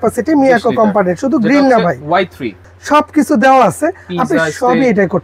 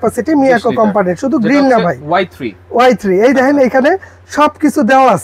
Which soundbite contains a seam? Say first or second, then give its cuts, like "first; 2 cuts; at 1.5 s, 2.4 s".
first; 1 cut; at 2.6 s